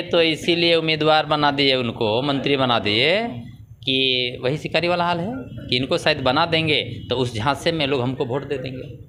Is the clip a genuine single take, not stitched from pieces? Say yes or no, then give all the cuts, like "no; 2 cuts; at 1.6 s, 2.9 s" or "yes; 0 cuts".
yes; 0 cuts